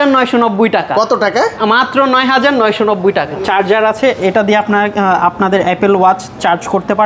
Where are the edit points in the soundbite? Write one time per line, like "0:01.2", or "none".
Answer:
0:03.3